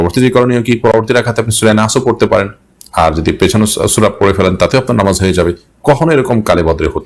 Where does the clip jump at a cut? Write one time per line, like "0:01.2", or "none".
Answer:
none